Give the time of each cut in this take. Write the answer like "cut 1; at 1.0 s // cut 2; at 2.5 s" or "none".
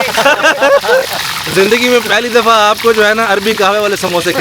none